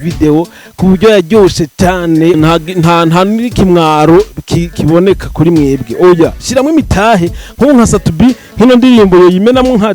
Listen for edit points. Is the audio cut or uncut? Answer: cut